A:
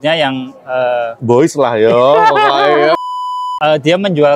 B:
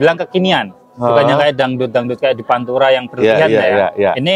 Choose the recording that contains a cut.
A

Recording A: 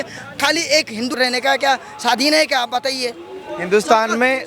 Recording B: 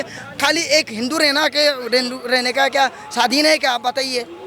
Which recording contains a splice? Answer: A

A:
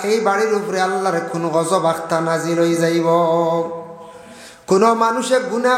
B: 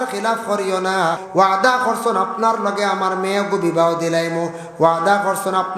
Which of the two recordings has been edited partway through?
B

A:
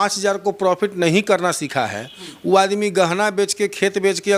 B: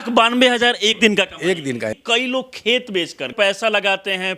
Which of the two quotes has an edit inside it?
B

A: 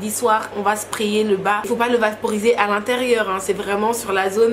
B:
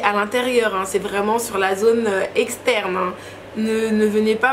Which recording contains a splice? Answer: A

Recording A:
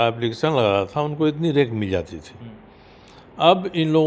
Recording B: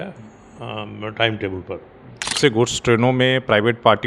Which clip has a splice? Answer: B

